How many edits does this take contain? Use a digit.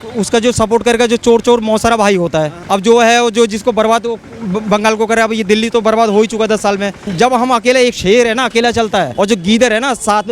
3